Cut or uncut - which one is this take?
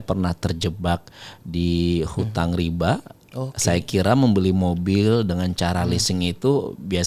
uncut